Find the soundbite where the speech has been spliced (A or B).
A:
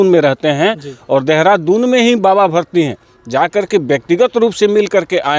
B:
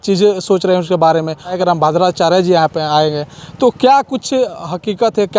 B